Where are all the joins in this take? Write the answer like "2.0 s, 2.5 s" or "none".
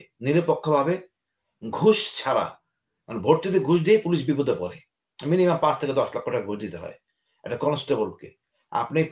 none